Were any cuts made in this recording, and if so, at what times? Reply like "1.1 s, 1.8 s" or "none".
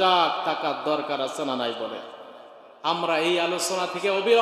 none